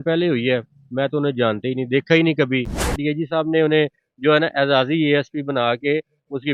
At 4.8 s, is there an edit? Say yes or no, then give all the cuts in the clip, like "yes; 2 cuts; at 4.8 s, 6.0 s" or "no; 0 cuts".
no; 1 cut; at 2.9 s